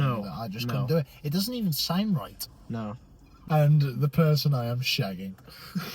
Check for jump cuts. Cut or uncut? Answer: cut